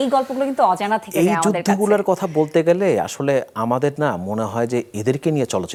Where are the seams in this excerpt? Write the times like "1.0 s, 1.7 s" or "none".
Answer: none